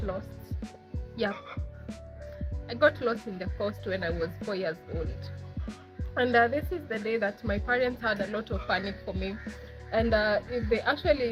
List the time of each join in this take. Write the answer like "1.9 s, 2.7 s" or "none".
none